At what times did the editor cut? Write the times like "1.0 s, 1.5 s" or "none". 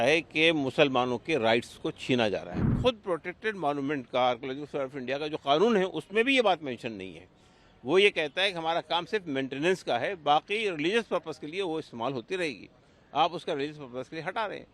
2.7 s

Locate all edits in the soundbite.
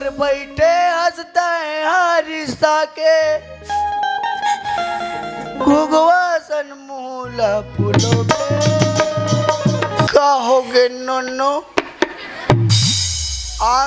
10.1 s

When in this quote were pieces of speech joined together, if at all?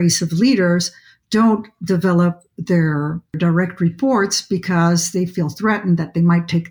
3.3 s

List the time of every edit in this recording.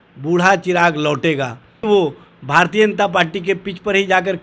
1.8 s

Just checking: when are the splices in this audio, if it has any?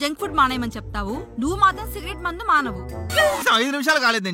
3.4 s

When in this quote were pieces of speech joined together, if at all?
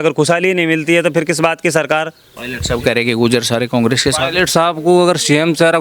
2.2 s

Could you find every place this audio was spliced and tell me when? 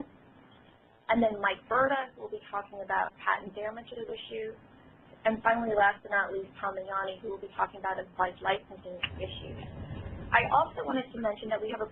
none

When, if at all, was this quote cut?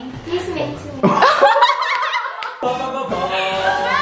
none

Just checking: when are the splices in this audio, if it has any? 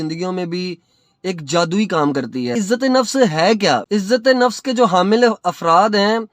2.5 s, 3.8 s

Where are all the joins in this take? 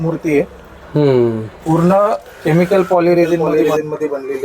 3.5 s

